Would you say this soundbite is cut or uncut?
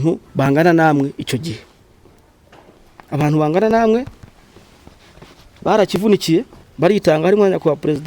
uncut